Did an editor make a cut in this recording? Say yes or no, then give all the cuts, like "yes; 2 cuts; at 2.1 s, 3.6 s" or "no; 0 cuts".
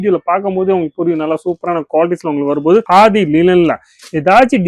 no; 0 cuts